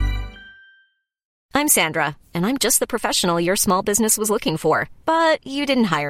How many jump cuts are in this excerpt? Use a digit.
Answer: 1